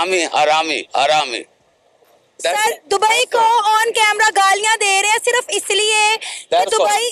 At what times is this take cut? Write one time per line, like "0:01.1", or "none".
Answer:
none